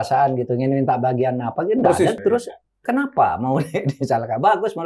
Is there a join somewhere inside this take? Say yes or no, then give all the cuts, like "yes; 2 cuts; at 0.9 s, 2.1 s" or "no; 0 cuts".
no; 0 cuts